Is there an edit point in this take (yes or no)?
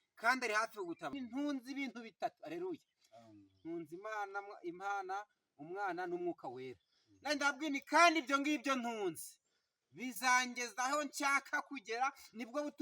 yes